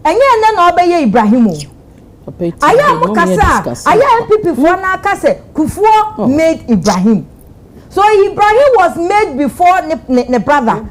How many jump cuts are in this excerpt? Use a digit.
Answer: 0